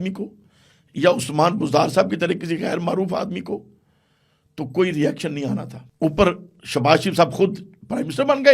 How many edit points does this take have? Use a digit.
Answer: 1